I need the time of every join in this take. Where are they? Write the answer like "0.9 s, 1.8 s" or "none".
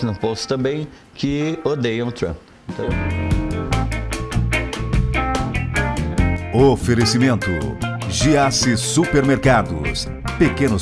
2.9 s